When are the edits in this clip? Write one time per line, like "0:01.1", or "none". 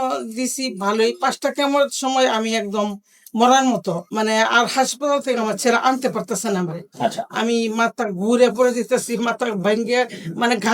0:04.0